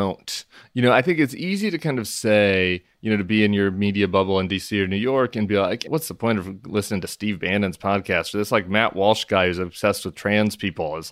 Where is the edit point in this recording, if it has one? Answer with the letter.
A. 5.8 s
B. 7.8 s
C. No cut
A